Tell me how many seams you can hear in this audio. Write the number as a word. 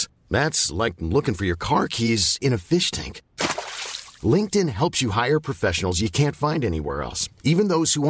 zero